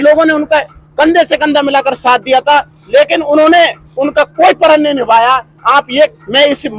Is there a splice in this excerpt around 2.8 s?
no; 0 cuts

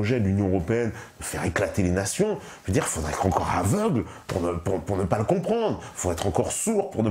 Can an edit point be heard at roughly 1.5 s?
no; 0 cuts

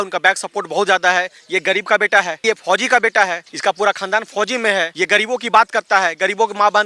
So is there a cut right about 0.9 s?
no; 3 cuts; at 2.4 s, 3.5 s, 4.9 s

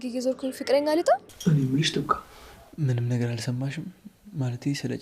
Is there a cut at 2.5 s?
no; 1 cut; at 1.3 s

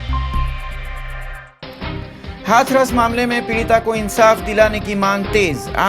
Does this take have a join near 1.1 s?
yes; 1 cut; at 1.1 s

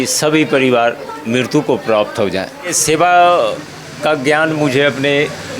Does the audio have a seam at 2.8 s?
yes; 1 cut; at 2.8 s

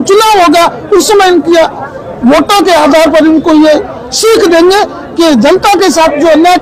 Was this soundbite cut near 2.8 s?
no; 0 cuts

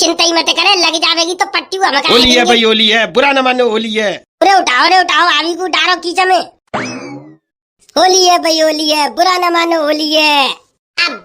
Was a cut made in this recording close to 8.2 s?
no; 1 cut; at 2.0 s

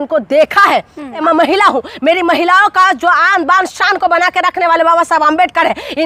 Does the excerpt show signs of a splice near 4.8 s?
no; 1 cut; at 1.2 s

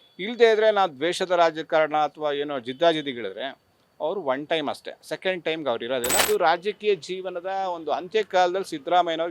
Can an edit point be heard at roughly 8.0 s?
no; 1 cut; at 6.2 s

